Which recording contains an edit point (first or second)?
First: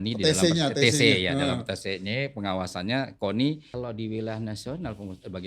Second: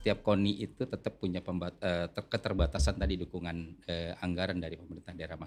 first